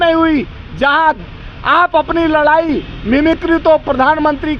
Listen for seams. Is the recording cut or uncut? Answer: uncut